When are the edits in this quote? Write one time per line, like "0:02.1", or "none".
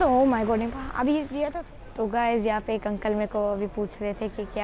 0:01.5